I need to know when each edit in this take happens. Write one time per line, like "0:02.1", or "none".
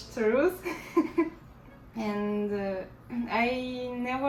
none